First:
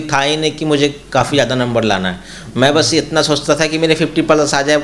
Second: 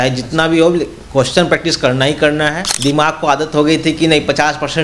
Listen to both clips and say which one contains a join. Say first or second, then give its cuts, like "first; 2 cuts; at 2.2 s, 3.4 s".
second; 1 cut; at 2.7 s